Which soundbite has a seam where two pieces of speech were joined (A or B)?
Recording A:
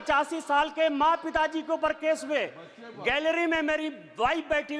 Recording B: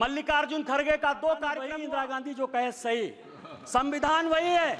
B